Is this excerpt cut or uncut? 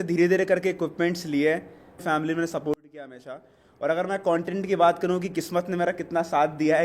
cut